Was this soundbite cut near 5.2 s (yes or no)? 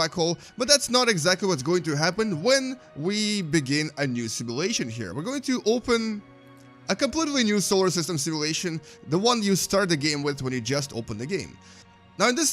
no